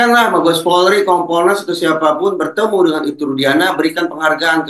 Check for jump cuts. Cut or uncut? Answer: uncut